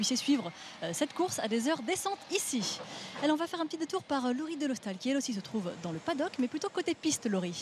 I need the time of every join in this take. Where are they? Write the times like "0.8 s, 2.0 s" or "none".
5.7 s